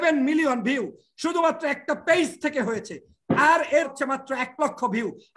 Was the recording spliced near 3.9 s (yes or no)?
yes